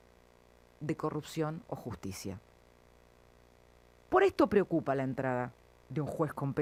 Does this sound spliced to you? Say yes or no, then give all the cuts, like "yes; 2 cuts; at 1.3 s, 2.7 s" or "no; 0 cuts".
no; 0 cuts